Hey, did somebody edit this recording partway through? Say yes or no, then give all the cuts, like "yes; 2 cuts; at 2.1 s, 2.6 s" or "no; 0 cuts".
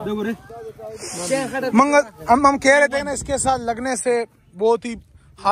no; 0 cuts